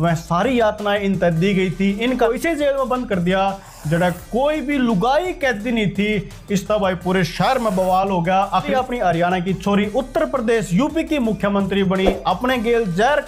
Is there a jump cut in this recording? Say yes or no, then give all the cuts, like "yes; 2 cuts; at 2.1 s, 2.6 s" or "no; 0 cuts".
yes; 2 cuts; at 2.3 s, 8.7 s